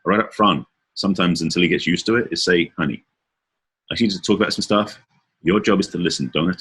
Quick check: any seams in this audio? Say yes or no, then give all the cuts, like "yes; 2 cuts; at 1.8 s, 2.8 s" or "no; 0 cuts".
no; 0 cuts